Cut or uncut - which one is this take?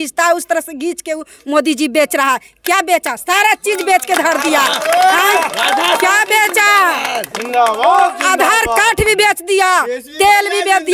uncut